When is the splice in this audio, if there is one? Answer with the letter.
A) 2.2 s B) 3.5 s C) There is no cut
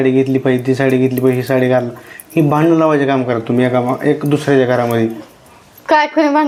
C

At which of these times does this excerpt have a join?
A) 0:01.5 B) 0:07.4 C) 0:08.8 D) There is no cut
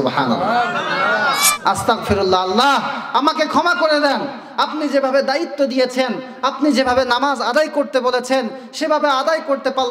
A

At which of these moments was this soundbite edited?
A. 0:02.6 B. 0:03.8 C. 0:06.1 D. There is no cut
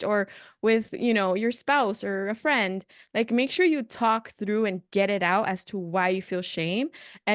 D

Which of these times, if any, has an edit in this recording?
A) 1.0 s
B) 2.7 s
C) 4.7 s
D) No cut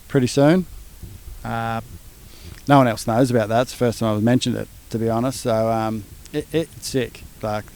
D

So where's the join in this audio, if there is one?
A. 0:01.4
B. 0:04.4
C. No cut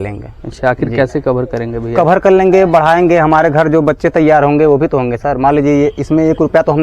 C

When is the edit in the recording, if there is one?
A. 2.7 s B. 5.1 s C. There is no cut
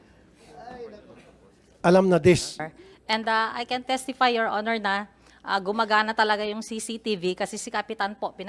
A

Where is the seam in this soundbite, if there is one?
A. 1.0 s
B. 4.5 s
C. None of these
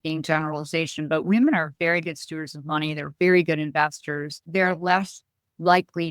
B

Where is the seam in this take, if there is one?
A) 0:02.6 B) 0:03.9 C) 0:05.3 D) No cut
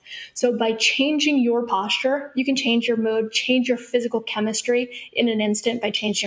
A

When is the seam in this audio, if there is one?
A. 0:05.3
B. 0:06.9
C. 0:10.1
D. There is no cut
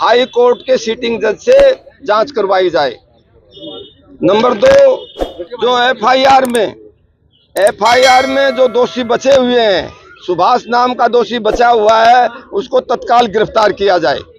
D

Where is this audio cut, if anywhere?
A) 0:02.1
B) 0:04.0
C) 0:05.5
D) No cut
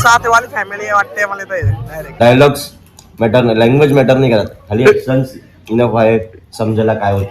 A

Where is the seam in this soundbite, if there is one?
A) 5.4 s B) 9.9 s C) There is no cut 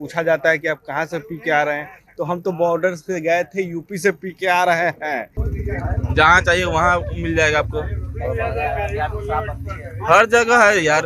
A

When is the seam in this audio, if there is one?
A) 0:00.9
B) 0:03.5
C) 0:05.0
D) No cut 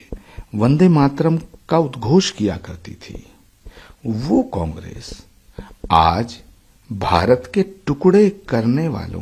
D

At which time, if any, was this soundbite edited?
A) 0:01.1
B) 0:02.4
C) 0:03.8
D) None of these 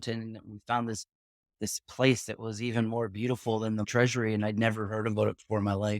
C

